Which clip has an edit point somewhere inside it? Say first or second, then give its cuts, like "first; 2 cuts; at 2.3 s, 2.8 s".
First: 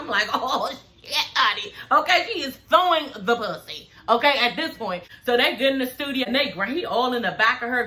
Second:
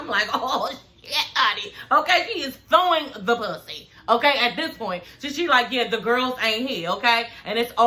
first; 2 cuts; at 5.1 s, 6.2 s